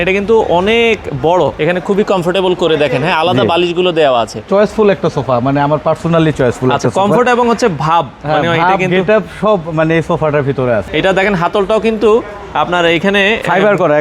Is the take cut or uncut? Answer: cut